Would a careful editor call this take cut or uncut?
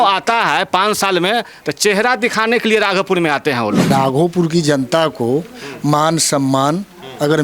cut